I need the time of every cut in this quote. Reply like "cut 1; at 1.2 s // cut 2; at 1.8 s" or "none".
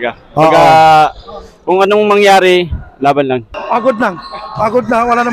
cut 1; at 3.5 s